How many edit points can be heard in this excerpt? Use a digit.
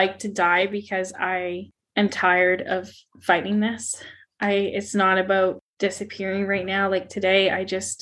0